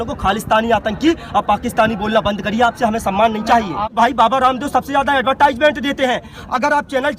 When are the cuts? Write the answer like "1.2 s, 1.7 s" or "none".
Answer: 3.9 s